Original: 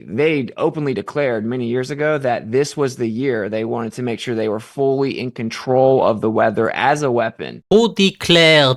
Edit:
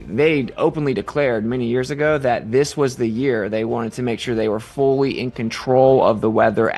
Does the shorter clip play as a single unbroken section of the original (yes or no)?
yes